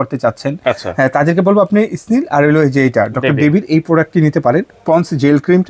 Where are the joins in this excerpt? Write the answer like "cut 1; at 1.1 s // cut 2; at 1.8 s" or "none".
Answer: cut 1; at 4.7 s